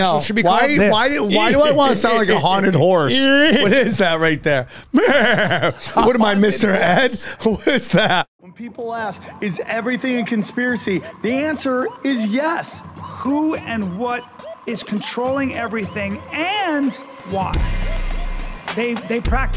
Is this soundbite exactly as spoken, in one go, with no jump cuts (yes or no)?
no